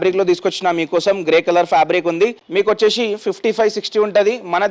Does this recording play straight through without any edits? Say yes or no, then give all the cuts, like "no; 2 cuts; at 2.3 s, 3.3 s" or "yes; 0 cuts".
no; 1 cut; at 2.4 s